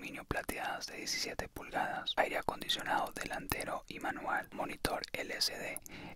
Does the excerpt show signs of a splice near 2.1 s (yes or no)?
yes